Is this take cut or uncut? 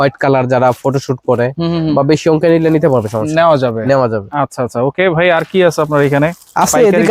uncut